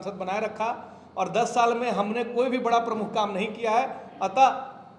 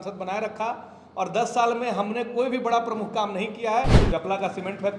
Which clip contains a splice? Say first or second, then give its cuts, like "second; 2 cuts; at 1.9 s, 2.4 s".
second; 1 cut; at 4.0 s